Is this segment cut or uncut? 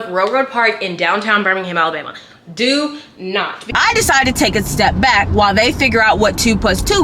cut